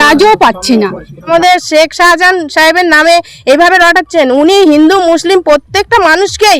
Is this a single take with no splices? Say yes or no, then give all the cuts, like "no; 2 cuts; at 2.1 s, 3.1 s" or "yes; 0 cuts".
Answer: no; 1 cut; at 1.3 s